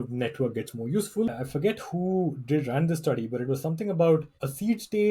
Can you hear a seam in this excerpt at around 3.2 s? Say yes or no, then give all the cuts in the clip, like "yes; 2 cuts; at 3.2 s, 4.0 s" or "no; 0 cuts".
no; 1 cut; at 1.3 s